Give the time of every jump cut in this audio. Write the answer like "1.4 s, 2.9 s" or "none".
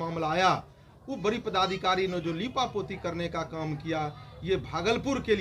none